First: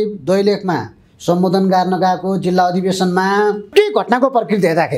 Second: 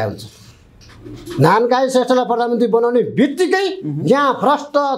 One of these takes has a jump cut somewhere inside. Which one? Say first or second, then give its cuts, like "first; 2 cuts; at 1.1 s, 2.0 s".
first; 1 cut; at 3.7 s